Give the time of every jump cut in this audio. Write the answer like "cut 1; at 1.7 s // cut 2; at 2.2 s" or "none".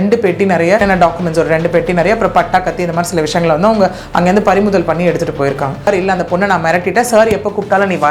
cut 1; at 0.8 s // cut 2; at 5.9 s